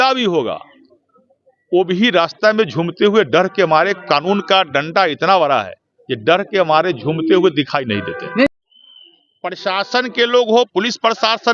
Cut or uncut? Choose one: cut